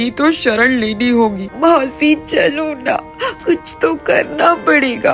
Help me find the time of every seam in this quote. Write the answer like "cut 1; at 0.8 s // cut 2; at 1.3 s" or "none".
cut 1; at 1.4 s